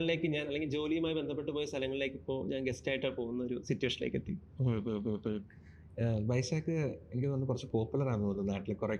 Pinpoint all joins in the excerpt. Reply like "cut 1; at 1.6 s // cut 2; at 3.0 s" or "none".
none